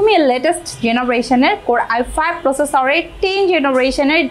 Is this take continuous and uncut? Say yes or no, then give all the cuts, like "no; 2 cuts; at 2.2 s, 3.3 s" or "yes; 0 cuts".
yes; 0 cuts